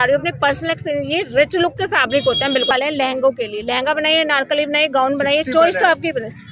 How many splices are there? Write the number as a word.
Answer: one